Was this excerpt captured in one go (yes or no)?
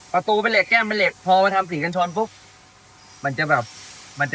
yes